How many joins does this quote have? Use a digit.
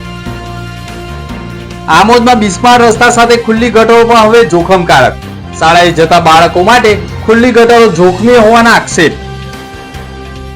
1